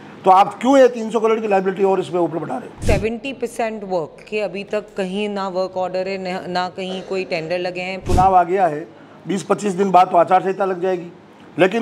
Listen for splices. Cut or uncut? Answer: cut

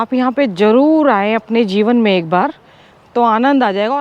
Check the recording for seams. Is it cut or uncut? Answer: uncut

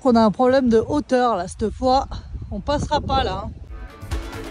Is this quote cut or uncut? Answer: uncut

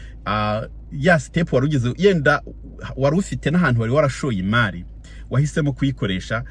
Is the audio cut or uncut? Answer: uncut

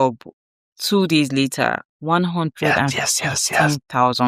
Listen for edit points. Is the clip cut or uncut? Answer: uncut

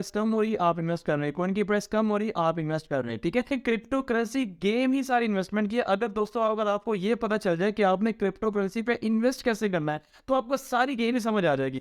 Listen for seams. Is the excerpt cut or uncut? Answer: cut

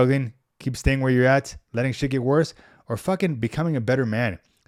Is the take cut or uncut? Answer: uncut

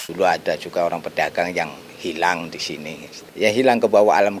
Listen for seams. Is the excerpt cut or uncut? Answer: cut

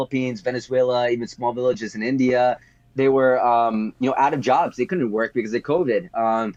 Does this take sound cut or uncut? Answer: uncut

